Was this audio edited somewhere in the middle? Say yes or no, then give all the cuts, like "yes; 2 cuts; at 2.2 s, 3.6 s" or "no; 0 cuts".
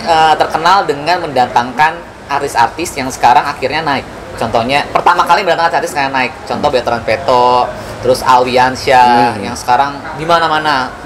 no; 0 cuts